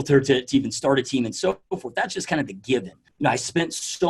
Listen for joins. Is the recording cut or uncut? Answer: cut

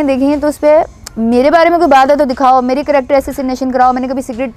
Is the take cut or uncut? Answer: uncut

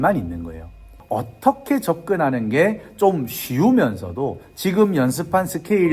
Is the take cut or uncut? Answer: cut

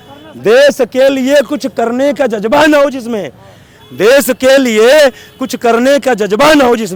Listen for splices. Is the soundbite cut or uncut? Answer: uncut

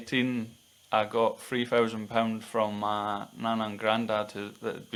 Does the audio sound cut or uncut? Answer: uncut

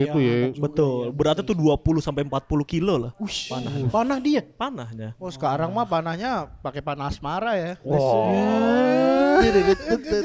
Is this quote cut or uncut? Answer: uncut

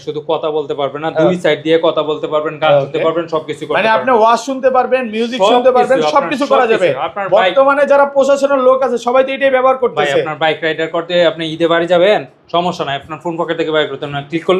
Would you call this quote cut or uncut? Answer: uncut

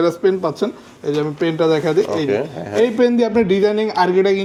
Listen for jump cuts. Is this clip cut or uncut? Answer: uncut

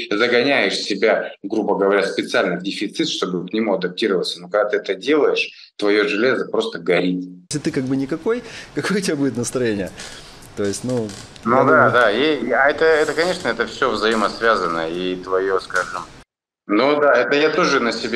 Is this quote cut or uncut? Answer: cut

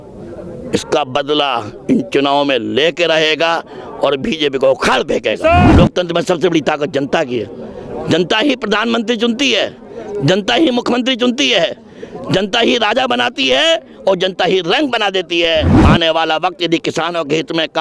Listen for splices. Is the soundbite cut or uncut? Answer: cut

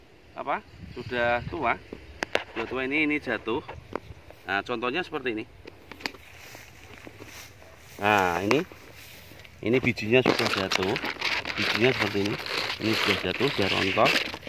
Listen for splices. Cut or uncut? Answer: uncut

